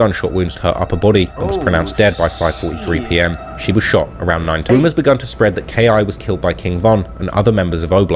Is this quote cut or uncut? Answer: cut